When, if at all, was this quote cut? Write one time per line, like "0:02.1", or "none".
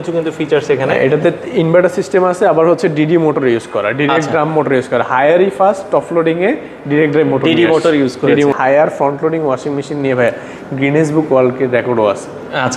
0:08.5